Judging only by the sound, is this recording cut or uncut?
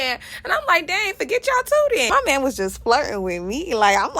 cut